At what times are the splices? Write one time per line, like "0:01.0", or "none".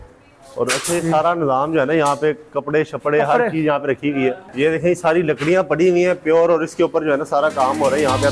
0:04.5